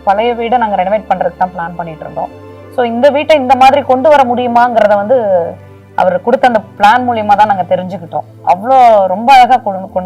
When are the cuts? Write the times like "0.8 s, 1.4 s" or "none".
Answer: none